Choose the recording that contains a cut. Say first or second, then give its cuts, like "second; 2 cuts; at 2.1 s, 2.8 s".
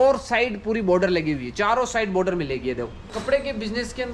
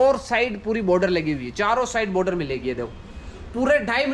first; 1 cut; at 3.1 s